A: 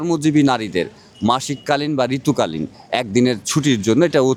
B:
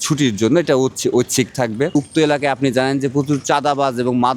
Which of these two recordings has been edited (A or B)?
B